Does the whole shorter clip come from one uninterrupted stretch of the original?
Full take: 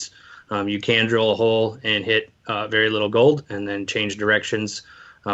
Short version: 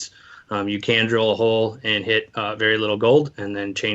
no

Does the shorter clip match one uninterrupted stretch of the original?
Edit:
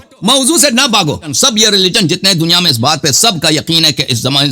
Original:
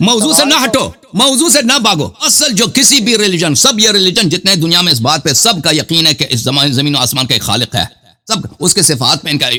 no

